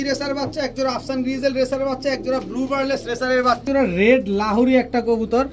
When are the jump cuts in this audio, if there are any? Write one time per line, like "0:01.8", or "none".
0:03.6